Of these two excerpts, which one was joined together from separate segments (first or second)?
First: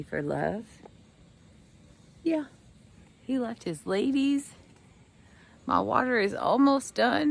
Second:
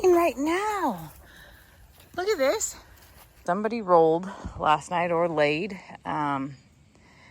second